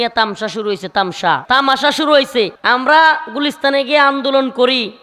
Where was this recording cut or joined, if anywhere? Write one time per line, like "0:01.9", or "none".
0:01.4
0:02.6